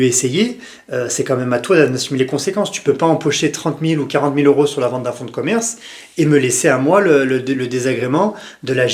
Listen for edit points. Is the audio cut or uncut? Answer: uncut